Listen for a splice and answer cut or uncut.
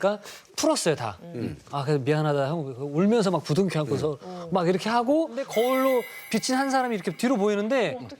cut